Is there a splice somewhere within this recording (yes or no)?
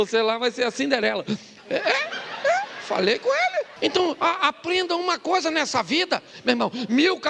yes